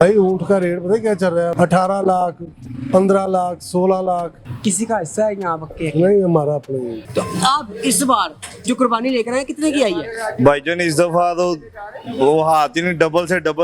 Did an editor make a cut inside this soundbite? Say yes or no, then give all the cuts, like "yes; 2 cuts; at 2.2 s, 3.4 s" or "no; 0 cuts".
yes; 3 cuts; at 1.5 s, 4.4 s, 7.0 s